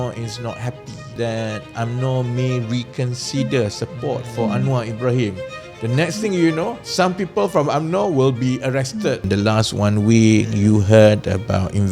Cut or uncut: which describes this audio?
cut